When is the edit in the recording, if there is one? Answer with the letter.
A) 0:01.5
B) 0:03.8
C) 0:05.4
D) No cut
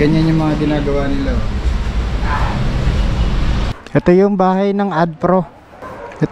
B